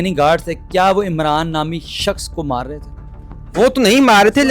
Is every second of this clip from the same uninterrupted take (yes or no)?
yes